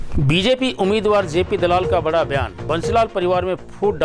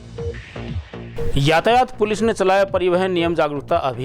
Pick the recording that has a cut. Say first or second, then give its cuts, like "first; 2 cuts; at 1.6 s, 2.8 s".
second; 1 cut; at 1.3 s